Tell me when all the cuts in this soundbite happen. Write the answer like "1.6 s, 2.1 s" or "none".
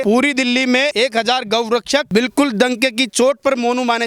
0.9 s, 2.1 s